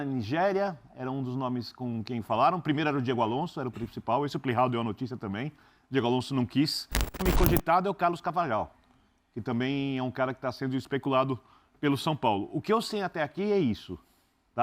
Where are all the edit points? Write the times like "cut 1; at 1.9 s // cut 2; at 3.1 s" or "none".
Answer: cut 1; at 7.2 s